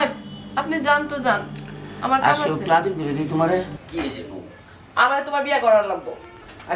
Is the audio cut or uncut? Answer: cut